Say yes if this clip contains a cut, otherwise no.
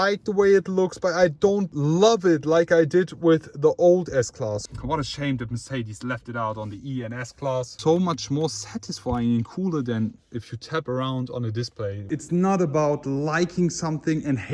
yes